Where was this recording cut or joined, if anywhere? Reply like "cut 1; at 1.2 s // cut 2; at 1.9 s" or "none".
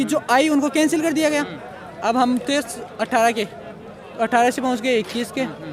none